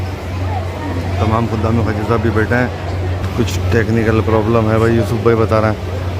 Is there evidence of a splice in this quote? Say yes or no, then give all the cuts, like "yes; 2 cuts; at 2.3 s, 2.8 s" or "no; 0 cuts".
yes; 1 cut; at 3.1 s